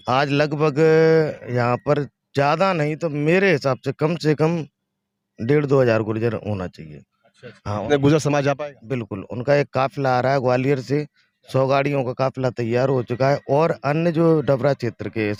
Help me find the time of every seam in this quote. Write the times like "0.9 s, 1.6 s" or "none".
none